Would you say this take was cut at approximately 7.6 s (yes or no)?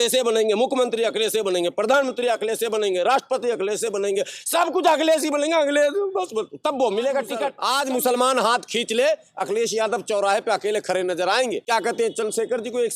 yes